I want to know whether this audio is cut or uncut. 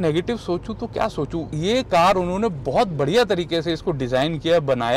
cut